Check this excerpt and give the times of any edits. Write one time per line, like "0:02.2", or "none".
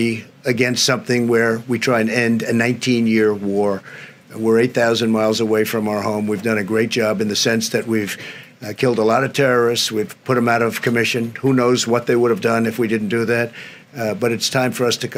none